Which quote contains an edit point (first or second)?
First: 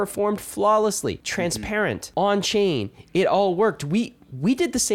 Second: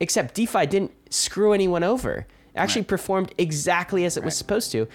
first